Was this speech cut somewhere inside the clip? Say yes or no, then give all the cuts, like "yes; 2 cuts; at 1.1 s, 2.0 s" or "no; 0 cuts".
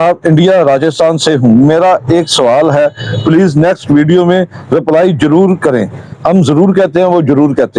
no; 0 cuts